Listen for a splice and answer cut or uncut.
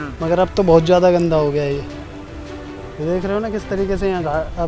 uncut